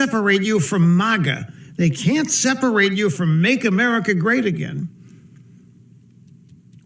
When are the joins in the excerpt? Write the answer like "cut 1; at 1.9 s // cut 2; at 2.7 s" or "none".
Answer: cut 1; at 2.2 s